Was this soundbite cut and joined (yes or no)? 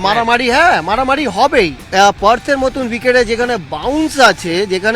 yes